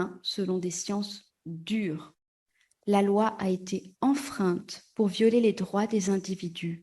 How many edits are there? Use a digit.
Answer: 1